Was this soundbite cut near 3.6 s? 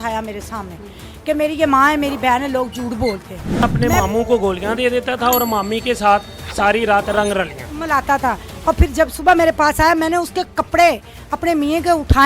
yes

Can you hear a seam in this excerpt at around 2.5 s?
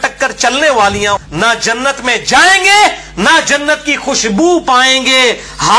no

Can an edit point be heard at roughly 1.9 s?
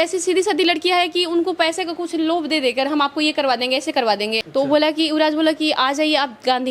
no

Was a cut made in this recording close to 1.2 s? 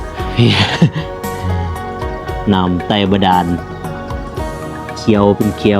no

